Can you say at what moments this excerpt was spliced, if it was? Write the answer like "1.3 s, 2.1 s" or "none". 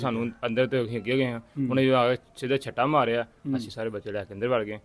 none